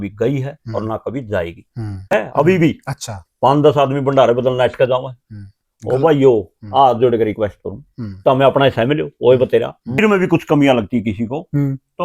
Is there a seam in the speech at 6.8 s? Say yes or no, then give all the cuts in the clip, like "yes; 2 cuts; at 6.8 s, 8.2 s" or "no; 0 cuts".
no; 2 cuts; at 2.1 s, 10.0 s